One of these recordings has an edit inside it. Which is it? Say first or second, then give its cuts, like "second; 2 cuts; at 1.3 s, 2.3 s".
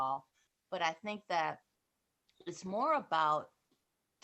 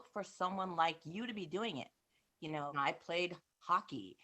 second; 1 cut; at 2.7 s